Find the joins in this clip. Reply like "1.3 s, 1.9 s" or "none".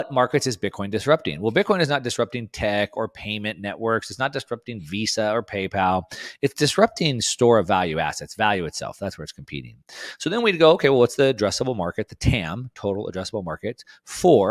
none

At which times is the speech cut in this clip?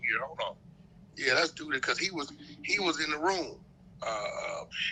none

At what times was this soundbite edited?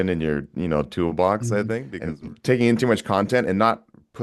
1.9 s

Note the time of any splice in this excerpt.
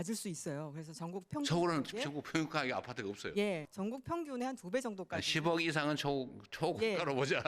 3.7 s

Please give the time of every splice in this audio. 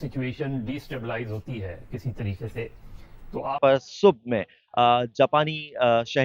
3.6 s

